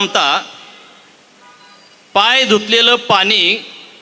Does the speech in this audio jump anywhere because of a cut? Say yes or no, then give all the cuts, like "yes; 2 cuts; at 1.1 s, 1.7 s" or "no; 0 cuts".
no; 0 cuts